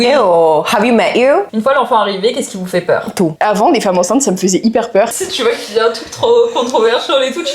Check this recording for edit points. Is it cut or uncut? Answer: cut